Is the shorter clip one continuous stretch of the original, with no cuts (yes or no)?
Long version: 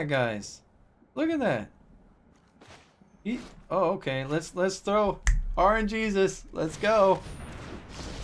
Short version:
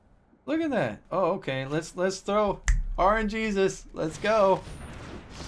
no